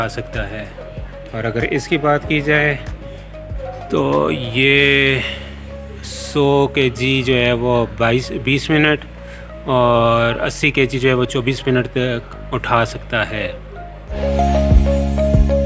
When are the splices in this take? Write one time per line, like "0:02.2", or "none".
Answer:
0:14.2